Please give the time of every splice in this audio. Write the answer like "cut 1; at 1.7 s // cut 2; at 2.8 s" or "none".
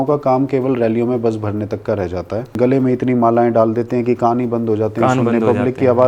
cut 1; at 2.5 s